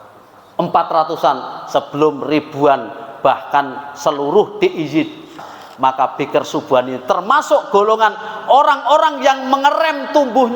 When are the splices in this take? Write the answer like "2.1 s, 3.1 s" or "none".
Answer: 5.5 s